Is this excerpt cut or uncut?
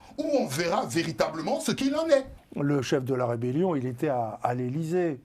cut